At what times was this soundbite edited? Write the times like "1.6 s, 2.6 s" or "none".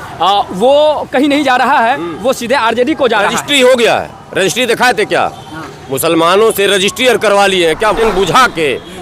8.0 s